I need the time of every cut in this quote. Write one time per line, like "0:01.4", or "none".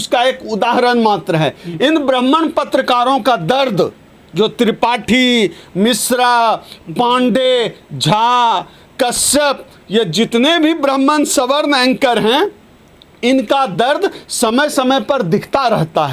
none